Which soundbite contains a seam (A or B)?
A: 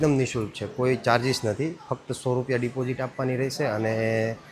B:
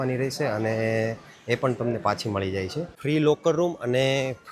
B